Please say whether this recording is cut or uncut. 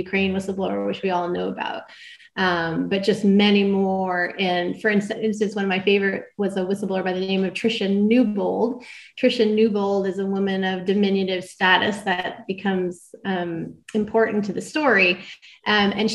uncut